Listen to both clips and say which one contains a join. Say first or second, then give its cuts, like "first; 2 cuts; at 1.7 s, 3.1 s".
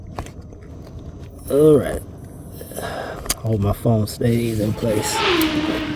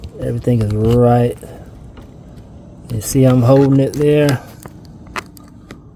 first; 1 cut; at 5.1 s